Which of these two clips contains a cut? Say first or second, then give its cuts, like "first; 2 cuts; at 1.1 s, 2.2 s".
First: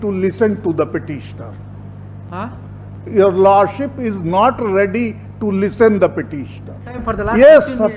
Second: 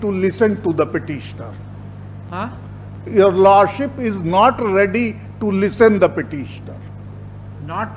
first; 1 cut; at 6.9 s